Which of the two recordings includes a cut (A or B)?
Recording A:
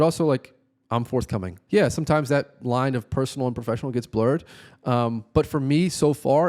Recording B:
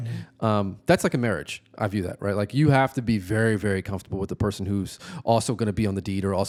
A